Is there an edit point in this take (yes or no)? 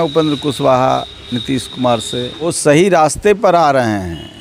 yes